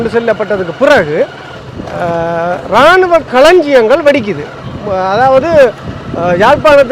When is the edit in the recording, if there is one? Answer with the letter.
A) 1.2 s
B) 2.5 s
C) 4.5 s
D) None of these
D